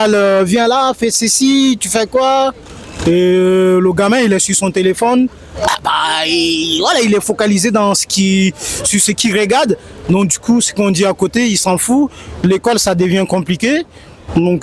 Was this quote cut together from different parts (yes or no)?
no